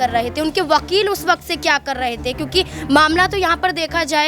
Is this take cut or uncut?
uncut